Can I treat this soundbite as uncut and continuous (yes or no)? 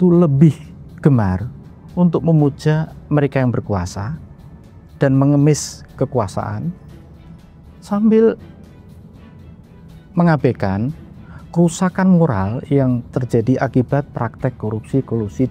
yes